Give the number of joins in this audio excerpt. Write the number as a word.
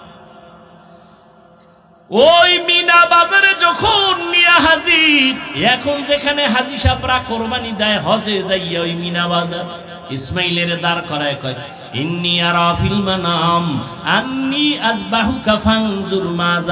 two